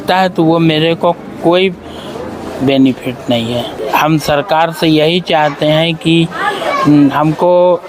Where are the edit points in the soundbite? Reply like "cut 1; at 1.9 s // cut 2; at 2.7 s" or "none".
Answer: cut 1; at 3.7 s